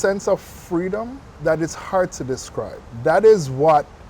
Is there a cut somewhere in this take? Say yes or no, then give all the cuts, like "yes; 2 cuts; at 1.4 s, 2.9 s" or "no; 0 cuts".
yes; 2 cuts; at 1.2 s, 2.8 s